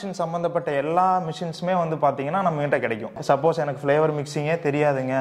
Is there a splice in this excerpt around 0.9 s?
no; 1 cut; at 3.1 s

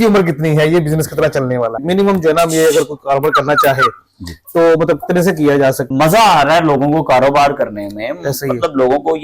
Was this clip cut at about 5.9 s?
yes; 2 cuts; at 1.8 s, 5.9 s

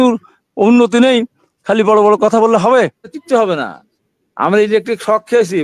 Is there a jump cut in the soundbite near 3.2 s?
yes; 1 cut; at 3.2 s

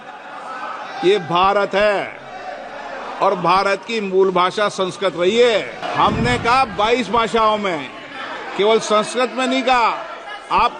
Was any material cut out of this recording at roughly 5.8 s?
yes; 1 cut; at 5.8 s

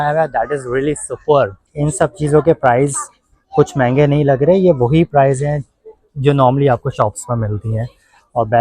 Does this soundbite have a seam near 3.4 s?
no; 1 cut; at 1.7 s

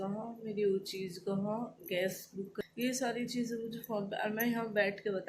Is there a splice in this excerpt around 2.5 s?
yes; 1 cut; at 2.5 s

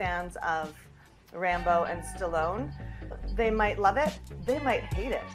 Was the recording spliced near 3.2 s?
yes; 1 cut; at 3.2 s

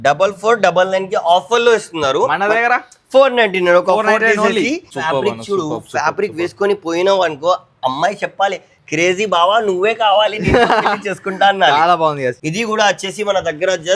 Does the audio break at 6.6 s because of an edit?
no; 2 cuts; at 4.9 s, 12.4 s

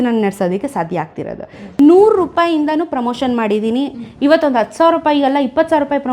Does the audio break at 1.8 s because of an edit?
yes; 1 cut; at 1.8 s

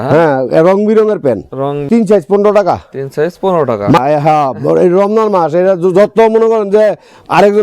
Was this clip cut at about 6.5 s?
no; 2 cuts; at 1.9 s, 4.0 s

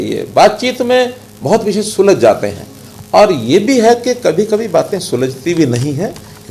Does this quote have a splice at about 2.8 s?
no; 0 cuts

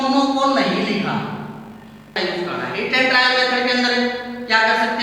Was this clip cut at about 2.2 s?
yes; 1 cut; at 2.2 s

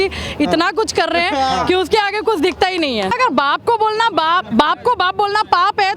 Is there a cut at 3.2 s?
yes; 1 cut; at 3.2 s

